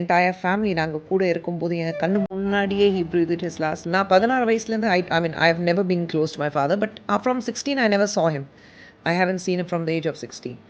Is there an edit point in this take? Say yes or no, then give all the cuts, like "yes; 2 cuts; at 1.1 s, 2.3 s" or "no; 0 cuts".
yes; 1 cut; at 3.8 s